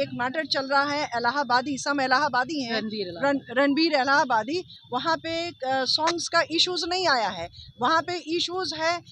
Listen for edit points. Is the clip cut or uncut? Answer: uncut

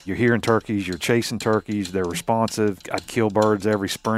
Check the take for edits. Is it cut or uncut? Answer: cut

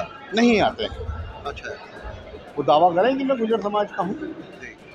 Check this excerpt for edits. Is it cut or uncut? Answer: uncut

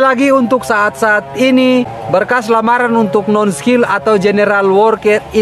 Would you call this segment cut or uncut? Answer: cut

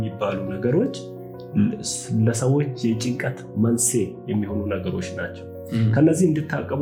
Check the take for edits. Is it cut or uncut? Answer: uncut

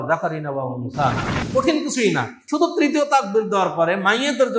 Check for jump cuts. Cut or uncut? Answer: cut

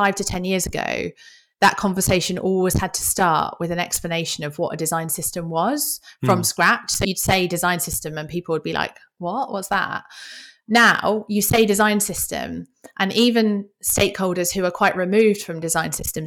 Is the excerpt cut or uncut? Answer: cut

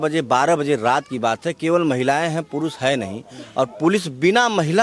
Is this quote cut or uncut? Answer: uncut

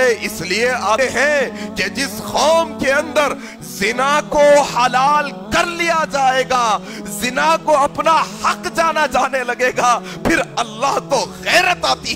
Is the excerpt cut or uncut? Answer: cut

